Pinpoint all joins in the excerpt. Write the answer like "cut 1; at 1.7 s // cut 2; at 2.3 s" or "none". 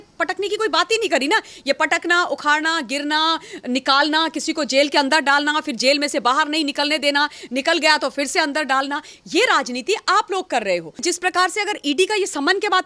cut 1; at 11.0 s